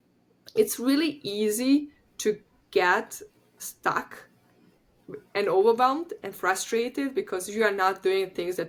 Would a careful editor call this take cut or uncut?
uncut